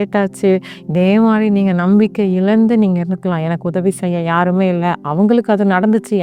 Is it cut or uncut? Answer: uncut